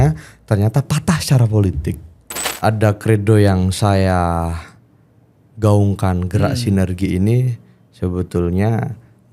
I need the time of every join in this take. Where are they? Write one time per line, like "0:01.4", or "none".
0:02.5